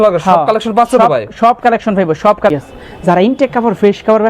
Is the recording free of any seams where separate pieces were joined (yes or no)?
no